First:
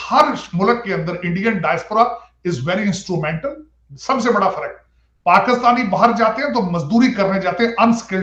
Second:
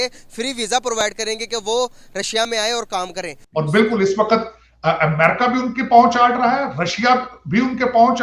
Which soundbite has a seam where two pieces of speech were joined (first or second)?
second